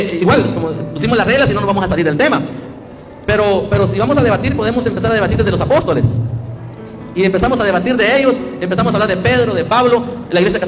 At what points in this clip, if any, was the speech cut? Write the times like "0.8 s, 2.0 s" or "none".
none